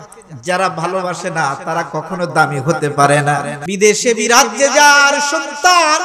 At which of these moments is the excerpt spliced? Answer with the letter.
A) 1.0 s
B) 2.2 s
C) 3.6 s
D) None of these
C